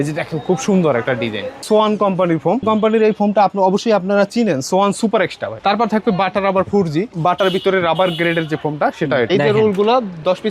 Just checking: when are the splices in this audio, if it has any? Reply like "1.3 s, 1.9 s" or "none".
1.6 s, 2.6 s, 5.5 s, 7.1 s, 9.3 s